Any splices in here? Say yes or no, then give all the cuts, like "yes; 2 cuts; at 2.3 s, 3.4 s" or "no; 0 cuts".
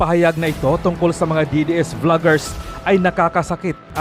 no; 0 cuts